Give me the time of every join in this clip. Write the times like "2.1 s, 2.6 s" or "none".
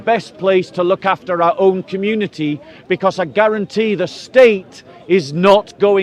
none